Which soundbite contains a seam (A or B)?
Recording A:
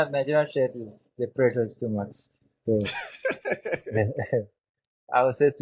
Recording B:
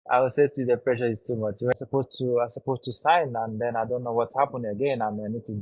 B